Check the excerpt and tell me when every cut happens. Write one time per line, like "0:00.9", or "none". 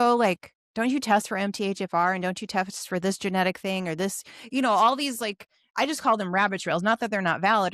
none

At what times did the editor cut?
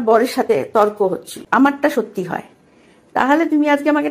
0:01.3

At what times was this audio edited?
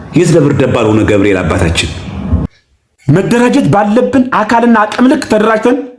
0:02.5

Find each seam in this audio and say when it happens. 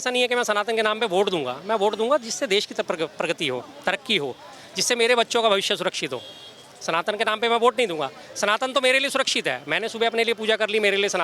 none

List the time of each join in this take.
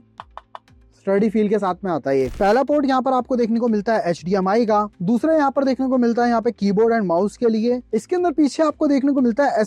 0:02.3
0:07.9

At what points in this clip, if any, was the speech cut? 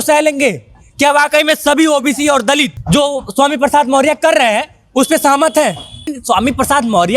0:02.8
0:06.1

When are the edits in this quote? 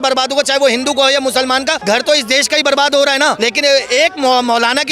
0:01.8
0:03.4

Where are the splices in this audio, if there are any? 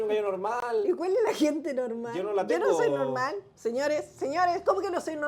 none

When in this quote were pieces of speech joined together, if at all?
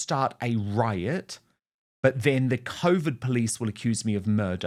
none

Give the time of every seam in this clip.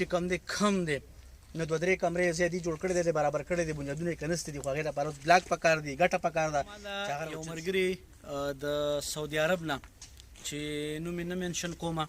0:07.2

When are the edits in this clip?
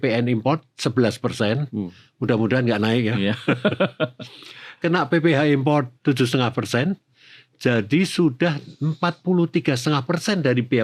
none

